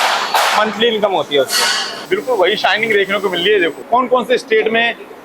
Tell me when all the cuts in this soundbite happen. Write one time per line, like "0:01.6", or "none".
0:01.9
0:03.8